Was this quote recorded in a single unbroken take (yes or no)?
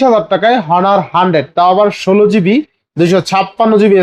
yes